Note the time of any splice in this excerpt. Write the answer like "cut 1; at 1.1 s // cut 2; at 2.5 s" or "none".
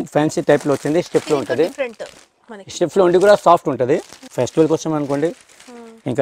cut 1; at 4.2 s